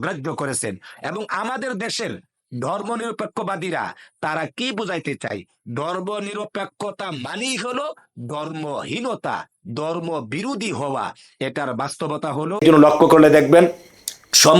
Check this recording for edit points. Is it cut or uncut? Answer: cut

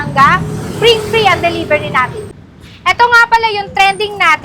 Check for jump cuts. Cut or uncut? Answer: cut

